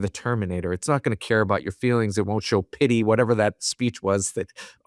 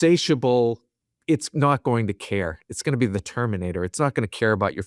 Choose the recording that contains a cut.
second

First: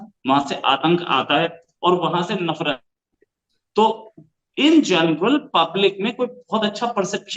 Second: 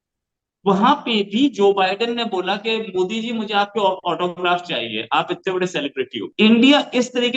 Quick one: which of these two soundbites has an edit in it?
second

